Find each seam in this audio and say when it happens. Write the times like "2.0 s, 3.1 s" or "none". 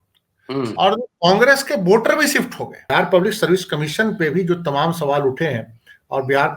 2.9 s